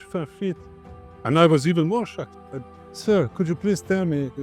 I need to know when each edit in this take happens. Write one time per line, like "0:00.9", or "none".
0:02.8